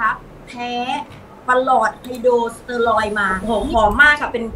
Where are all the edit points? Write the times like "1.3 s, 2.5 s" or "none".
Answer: 3.4 s

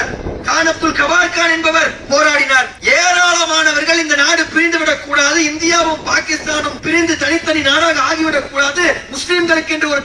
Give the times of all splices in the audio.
2.7 s, 6.8 s

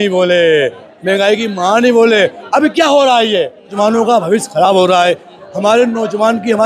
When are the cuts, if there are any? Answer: 3.7 s

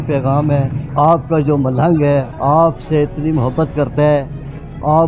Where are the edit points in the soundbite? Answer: 0.8 s, 2.3 s

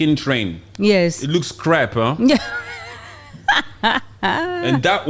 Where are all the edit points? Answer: none

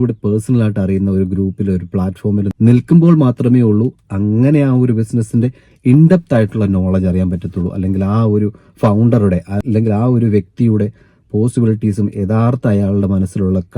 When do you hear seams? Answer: 2.5 s, 9.6 s

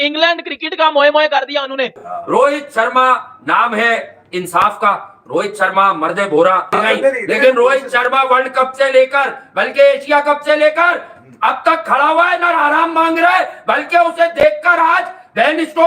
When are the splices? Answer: 2.1 s, 6.7 s

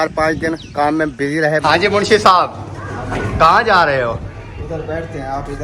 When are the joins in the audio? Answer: 1.6 s

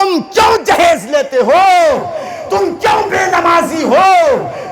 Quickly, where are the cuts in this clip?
none

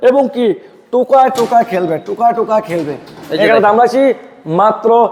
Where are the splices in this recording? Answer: none

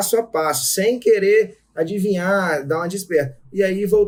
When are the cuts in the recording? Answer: none

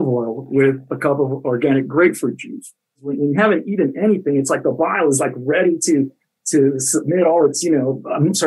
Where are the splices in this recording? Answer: 3.1 s

